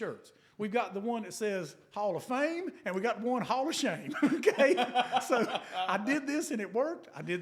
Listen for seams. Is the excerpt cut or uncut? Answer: uncut